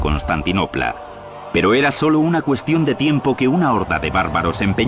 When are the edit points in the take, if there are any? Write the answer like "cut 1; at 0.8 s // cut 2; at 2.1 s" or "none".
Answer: cut 1; at 2.4 s